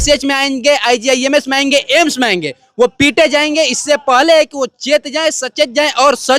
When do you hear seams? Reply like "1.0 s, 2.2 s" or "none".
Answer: none